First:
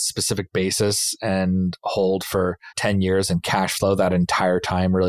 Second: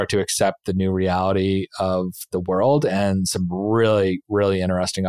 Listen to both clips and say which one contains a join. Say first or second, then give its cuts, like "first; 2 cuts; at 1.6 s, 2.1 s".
first; 1 cut; at 2.7 s